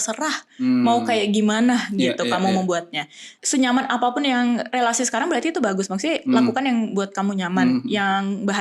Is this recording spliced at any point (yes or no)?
yes